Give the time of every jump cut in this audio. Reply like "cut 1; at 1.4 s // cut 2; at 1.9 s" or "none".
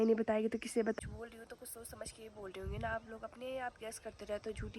cut 1; at 1.0 s